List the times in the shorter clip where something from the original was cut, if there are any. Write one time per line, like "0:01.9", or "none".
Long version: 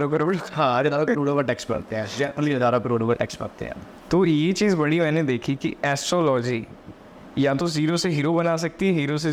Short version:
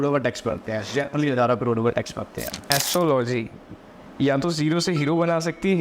0:02.7